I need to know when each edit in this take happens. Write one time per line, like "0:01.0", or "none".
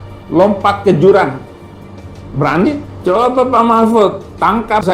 0:02.9